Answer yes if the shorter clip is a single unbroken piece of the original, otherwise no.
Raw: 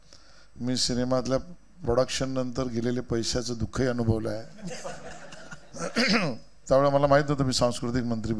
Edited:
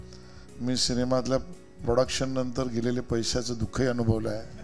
yes